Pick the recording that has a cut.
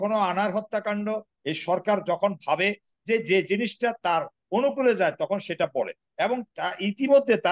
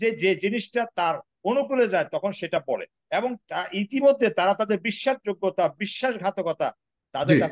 first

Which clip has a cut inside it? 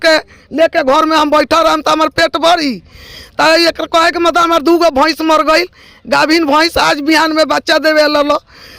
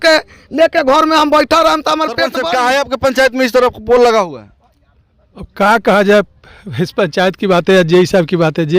second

